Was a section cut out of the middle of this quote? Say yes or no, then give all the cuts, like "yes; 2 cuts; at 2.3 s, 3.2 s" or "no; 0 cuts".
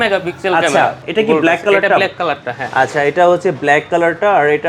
yes; 1 cut; at 1.0 s